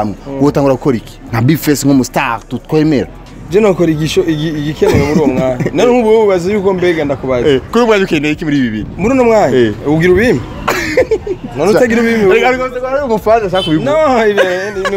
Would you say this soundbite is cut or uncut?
uncut